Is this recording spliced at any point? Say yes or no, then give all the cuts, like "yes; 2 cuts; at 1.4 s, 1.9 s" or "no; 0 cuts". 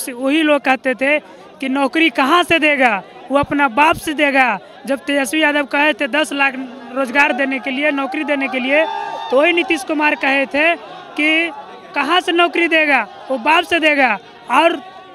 no; 0 cuts